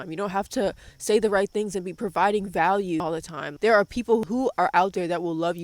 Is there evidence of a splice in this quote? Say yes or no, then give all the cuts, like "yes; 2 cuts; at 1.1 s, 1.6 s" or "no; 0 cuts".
yes; 2 cuts; at 3.1 s, 4.2 s